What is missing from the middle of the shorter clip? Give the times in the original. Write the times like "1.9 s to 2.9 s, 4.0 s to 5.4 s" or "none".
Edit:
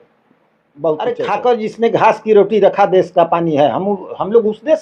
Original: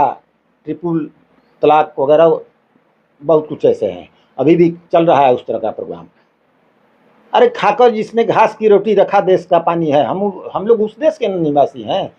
3.6 s to 7.5 s